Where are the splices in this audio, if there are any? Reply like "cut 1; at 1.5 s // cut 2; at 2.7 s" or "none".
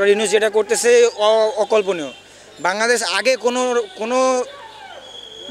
none

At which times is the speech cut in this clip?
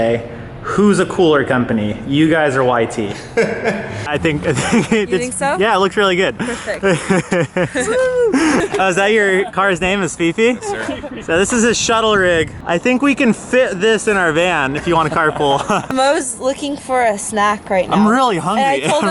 cut 1; at 4.0 s // cut 2; at 8.7 s // cut 3; at 12.6 s // cut 4; at 15.9 s

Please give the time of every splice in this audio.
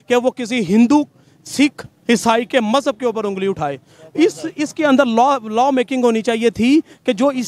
none

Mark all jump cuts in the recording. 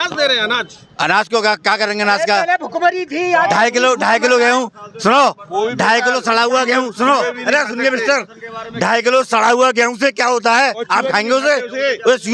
none

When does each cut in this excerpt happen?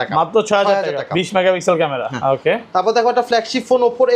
none

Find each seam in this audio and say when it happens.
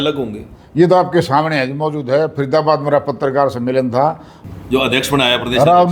cut 1; at 4.4 s

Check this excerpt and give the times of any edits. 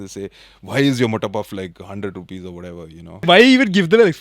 cut 1; at 3.2 s

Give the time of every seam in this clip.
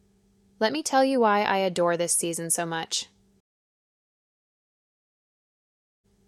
none

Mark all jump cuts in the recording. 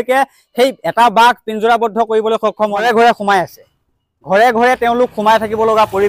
cut 1; at 2.8 s

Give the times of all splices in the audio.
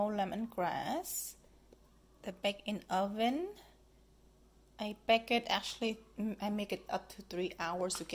none

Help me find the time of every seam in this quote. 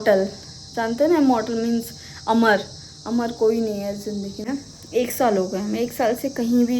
cut 1; at 4.5 s

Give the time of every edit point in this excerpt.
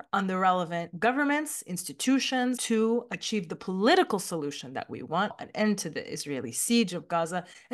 cut 1; at 2.6 s // cut 2; at 5.4 s

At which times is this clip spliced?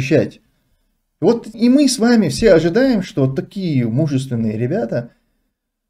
none

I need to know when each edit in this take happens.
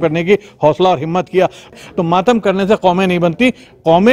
cut 1; at 1.7 s

